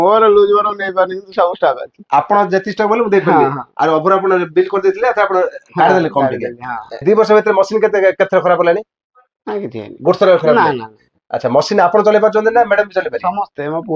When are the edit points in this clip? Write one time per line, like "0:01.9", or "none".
0:07.0